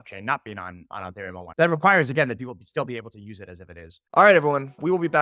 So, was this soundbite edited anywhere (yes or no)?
yes